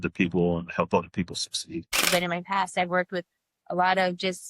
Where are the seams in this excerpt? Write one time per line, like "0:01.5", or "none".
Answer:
0:02.1

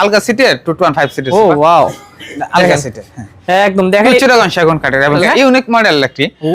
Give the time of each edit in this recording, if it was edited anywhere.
0:05.1

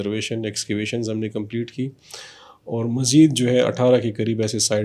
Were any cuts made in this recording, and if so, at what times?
none

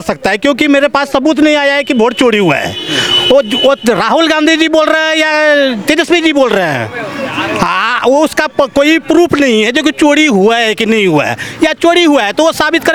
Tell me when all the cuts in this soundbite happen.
none

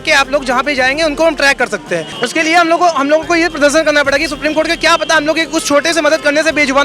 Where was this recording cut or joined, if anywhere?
0:02.1

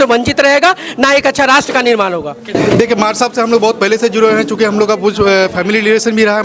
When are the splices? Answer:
none

